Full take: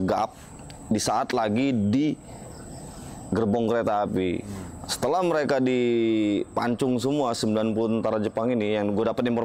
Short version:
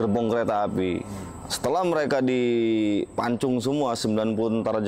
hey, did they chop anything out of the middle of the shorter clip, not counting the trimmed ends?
no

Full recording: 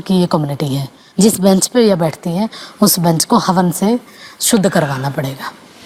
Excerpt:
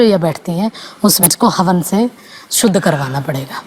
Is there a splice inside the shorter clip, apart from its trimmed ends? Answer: yes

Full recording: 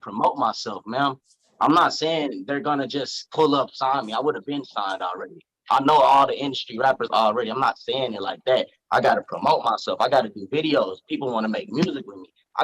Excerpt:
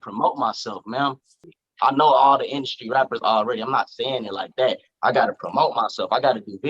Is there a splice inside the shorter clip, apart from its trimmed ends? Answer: yes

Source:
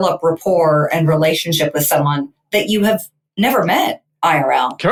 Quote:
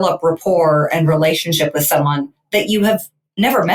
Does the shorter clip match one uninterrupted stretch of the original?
yes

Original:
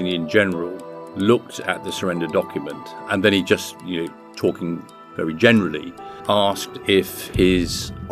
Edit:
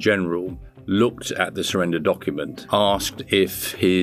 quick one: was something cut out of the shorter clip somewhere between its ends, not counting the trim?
yes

